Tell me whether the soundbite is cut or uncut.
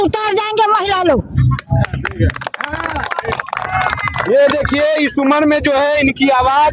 uncut